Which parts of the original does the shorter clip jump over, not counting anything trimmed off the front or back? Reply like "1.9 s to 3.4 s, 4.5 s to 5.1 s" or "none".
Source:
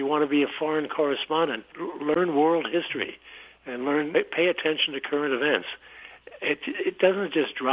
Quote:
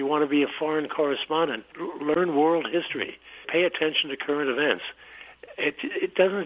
3.5 s to 4.3 s